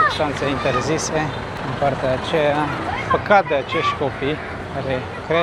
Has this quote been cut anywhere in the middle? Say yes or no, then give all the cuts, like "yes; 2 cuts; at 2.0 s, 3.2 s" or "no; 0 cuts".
no; 0 cuts